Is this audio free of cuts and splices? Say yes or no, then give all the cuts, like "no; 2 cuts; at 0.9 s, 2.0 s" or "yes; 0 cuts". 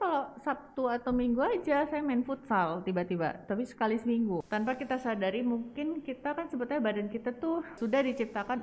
no; 2 cuts; at 4.4 s, 7.7 s